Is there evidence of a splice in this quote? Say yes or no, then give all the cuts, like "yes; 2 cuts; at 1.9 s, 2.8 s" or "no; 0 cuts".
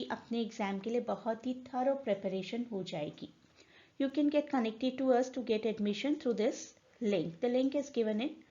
yes; 1 cut; at 6.0 s